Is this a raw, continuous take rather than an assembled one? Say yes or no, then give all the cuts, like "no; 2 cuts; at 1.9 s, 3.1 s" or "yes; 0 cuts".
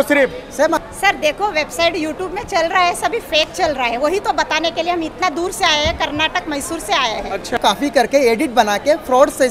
no; 2 cuts; at 0.8 s, 7.6 s